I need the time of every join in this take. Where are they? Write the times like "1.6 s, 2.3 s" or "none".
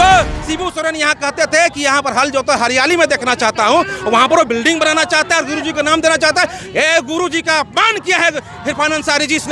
none